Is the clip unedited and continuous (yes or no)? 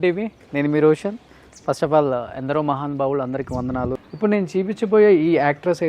yes